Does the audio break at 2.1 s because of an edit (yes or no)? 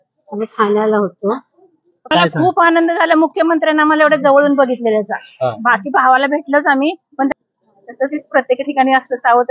yes